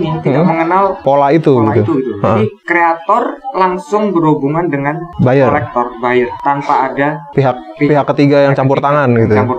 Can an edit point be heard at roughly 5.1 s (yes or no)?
yes